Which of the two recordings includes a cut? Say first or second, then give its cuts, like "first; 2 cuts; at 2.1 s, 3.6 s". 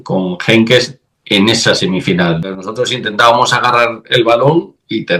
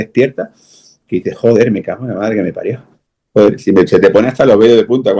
first; 1 cut; at 2.5 s